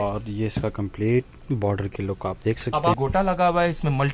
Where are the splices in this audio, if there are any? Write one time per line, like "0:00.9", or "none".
0:03.0